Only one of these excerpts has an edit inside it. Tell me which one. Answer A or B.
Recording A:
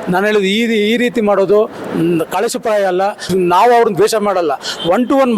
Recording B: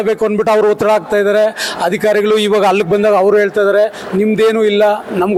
A